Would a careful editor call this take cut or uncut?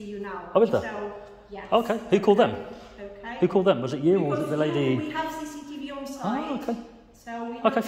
uncut